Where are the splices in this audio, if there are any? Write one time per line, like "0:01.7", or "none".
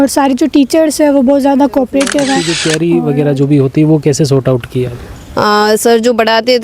0:02.6